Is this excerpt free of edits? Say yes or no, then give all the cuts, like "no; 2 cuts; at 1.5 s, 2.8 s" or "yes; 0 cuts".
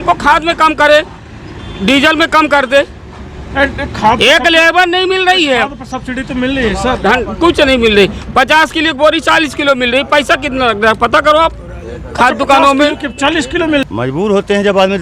no; 1 cut; at 13.8 s